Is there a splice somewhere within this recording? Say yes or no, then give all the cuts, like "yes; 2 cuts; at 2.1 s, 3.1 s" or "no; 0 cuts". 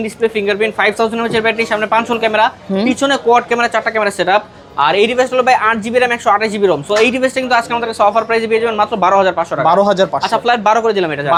no; 0 cuts